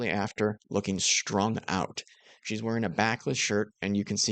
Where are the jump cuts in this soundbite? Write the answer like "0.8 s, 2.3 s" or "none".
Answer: none